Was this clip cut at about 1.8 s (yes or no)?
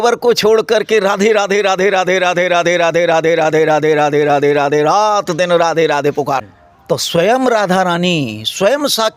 no